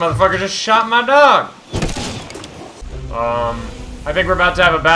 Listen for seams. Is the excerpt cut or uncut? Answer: cut